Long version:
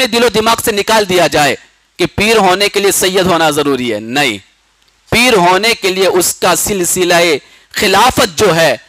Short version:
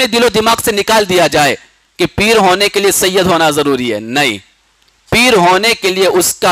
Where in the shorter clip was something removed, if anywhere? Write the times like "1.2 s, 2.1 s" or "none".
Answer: none